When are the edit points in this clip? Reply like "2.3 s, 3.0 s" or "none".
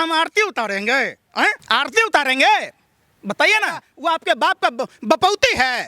1.6 s, 3.9 s